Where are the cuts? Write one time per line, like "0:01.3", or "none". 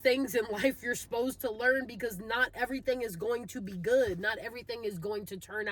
none